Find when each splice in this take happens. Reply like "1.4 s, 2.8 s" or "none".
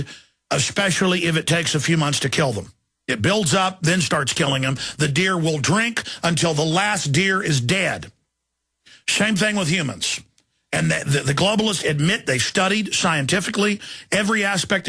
none